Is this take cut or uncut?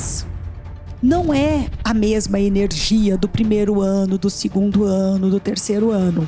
uncut